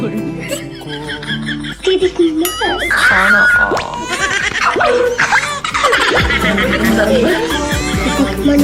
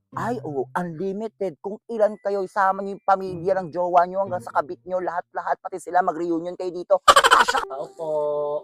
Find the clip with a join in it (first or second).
second